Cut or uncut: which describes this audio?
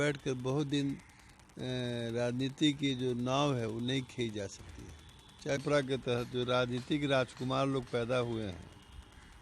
cut